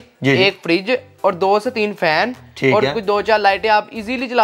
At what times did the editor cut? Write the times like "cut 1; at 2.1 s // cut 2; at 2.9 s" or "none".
none